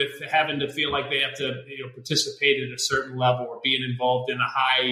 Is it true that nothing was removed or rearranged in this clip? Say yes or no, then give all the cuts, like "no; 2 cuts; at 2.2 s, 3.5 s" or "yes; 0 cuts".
yes; 0 cuts